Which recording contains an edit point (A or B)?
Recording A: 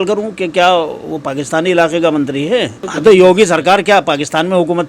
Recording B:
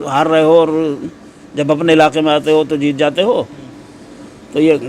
A